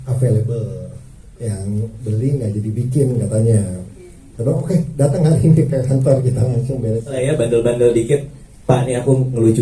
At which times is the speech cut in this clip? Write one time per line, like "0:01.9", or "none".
0:07.2